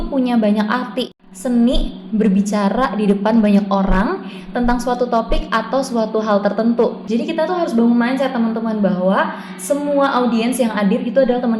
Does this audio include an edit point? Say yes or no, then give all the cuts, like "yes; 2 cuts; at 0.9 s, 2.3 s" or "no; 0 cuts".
yes; 2 cuts; at 1.1 s, 7.0 s